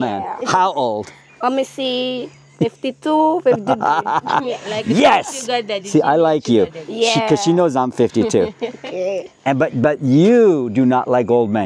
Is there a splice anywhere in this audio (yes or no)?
no